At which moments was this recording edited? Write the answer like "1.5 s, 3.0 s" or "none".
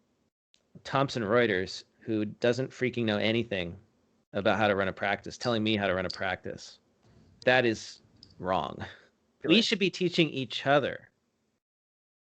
0.8 s, 9.4 s

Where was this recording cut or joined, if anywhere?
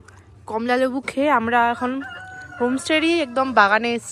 none

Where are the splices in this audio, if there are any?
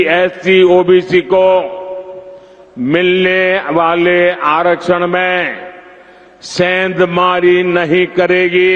none

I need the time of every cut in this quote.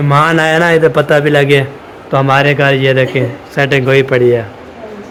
none

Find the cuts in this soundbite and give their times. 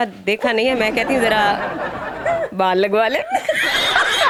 none

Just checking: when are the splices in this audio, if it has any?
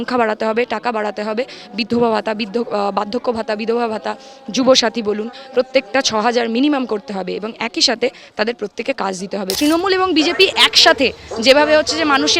9.5 s

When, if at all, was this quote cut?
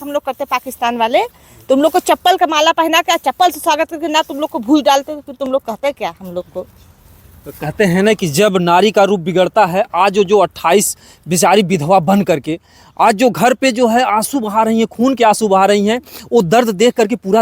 none

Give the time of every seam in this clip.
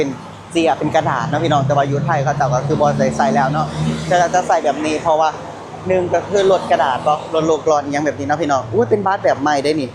none

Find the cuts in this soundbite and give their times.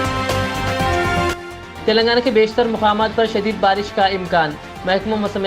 1.3 s

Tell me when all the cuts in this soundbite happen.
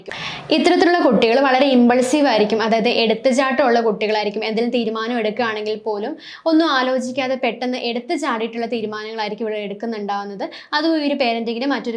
none

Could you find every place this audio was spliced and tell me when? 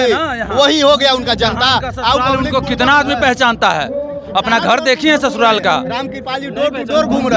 none

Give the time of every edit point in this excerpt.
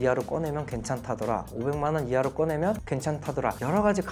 none

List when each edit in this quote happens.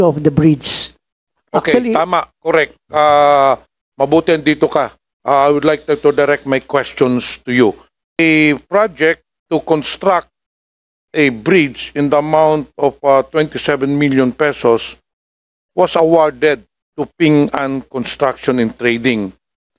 7.9 s

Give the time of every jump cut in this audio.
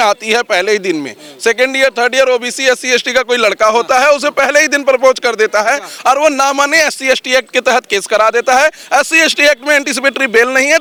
none

